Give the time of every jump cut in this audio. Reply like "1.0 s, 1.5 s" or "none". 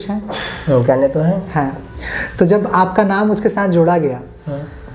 none

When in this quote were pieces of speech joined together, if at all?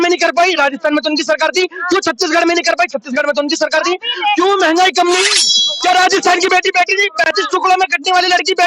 5.2 s

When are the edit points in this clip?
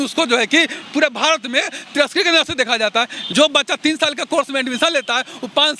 3.3 s

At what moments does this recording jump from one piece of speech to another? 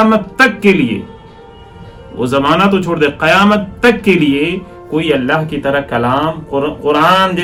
none

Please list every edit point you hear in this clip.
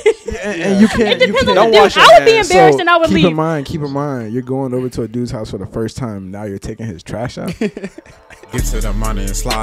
8.4 s

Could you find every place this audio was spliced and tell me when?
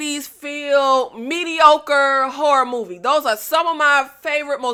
none

